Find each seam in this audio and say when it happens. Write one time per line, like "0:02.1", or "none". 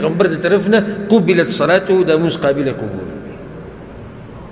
none